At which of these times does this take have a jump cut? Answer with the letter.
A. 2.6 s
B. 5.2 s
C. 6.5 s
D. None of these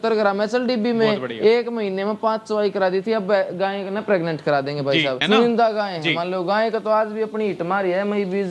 B